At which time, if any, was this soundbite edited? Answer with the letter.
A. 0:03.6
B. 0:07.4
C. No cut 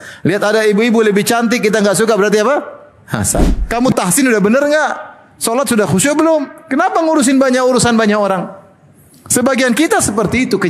A